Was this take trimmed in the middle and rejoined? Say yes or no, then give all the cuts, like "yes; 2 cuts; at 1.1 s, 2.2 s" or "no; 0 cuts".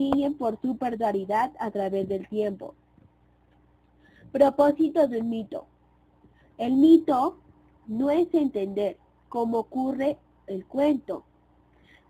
yes; 1 cut; at 3.2 s